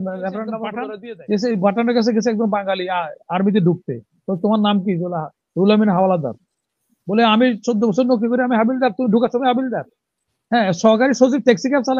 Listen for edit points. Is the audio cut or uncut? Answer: cut